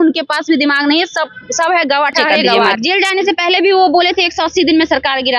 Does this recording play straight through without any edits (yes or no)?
no